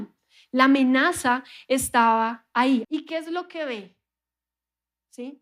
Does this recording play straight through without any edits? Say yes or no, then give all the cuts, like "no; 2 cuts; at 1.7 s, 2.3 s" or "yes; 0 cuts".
no; 1 cut; at 2.8 s